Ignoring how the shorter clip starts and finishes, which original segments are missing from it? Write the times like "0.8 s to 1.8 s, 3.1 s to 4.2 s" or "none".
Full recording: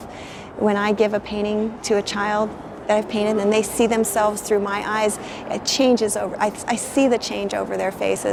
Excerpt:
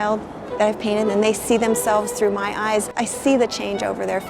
5.2 s to 6.7 s